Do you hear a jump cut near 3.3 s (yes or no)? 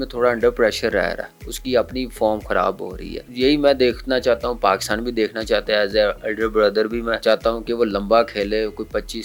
no